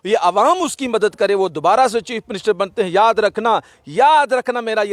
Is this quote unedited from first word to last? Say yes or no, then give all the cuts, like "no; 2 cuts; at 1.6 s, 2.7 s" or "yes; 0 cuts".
yes; 0 cuts